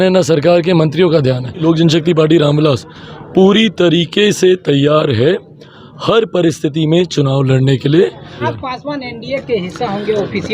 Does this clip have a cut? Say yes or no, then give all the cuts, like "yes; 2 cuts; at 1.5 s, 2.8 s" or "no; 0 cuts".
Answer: yes; 2 cuts; at 1.6 s, 8.5 s